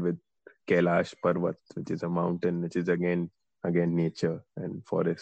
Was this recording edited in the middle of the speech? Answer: no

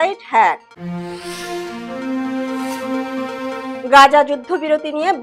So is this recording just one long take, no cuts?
yes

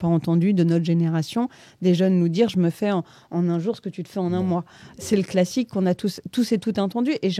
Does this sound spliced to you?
no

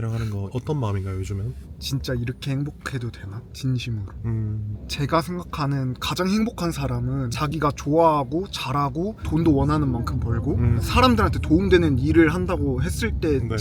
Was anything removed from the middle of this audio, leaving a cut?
no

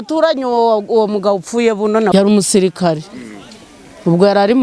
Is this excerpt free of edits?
no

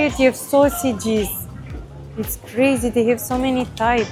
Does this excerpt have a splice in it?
no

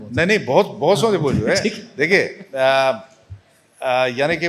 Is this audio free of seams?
yes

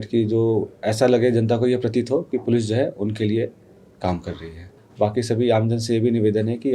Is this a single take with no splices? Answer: no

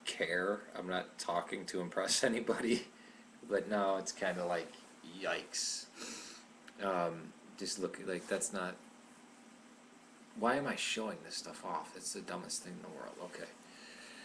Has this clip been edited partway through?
yes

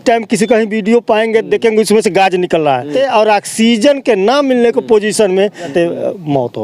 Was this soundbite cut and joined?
yes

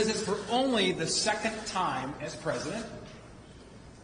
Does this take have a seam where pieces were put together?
yes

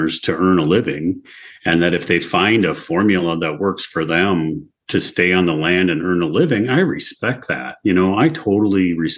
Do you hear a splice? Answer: no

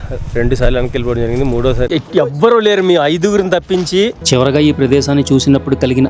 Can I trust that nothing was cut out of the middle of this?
no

